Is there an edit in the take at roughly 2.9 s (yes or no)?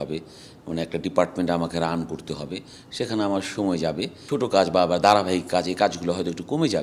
no